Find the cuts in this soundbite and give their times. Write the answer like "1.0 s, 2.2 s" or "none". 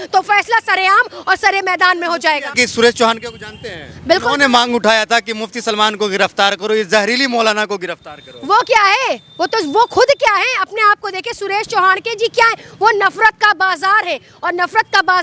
2.5 s